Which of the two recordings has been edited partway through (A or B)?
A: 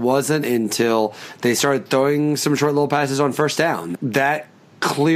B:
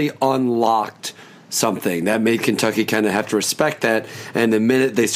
A